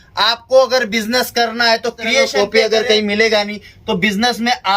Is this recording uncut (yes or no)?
no